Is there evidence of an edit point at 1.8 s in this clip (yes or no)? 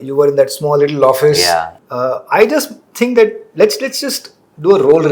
yes